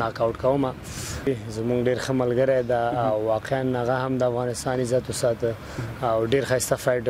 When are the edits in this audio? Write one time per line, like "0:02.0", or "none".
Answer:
0:01.3